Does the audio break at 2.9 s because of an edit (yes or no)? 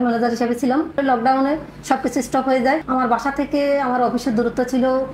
yes